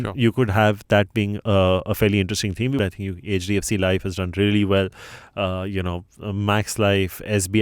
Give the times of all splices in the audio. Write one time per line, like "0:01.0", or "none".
0:02.8